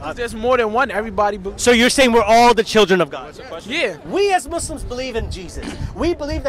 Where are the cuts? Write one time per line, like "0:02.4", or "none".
0:04.0